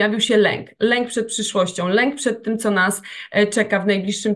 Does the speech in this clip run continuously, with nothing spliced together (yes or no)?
yes